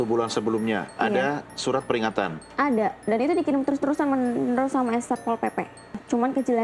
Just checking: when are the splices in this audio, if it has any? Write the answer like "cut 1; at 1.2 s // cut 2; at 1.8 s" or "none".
none